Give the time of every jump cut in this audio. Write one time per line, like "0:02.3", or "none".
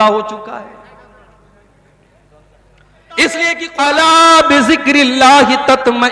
0:03.6